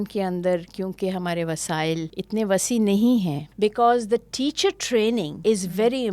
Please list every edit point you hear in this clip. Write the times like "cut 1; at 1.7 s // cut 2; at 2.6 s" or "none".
cut 1; at 2.2 s // cut 2; at 3.5 s // cut 3; at 5.3 s